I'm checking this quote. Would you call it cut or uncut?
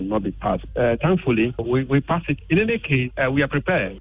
cut